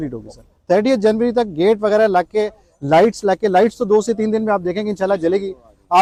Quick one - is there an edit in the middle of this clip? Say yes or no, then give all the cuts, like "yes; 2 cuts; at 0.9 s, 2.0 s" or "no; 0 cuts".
no; 0 cuts